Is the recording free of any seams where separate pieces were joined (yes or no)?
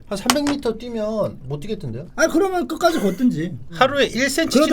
no